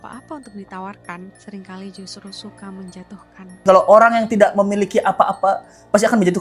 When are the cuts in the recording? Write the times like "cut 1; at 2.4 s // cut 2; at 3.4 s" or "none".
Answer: cut 1; at 3.6 s